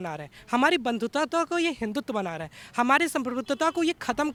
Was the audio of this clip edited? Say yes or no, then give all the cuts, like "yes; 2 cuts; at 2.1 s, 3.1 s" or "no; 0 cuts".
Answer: no; 0 cuts